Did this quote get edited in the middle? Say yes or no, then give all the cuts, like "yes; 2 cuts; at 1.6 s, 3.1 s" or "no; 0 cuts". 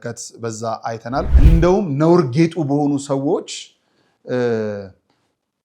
yes; 1 cut; at 1.3 s